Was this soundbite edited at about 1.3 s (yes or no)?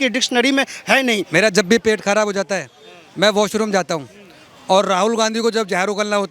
yes